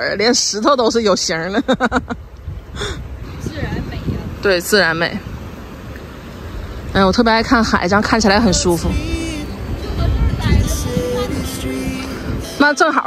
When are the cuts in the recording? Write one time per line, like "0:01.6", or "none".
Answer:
0:03.2

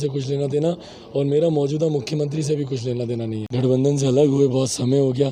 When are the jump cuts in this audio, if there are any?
0:03.4

